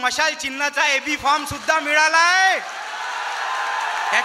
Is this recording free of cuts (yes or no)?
yes